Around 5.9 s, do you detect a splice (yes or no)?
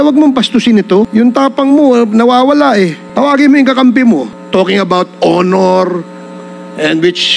no